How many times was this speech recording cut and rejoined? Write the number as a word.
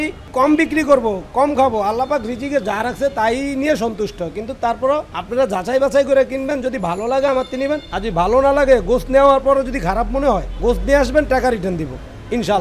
three